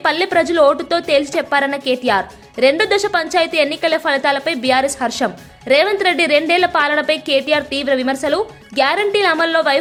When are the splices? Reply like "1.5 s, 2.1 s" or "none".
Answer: none

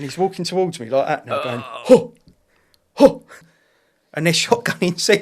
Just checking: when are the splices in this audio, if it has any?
3.3 s

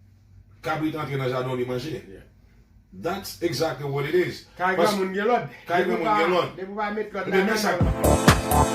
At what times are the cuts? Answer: 7.8 s

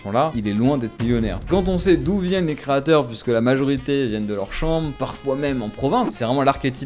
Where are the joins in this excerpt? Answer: 1.5 s, 6.1 s

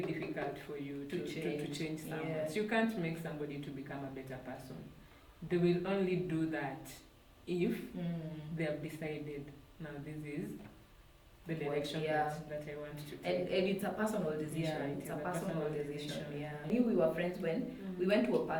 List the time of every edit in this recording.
16.7 s

